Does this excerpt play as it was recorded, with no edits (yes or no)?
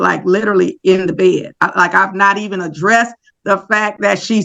yes